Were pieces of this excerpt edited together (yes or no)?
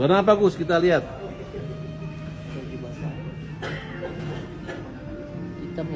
no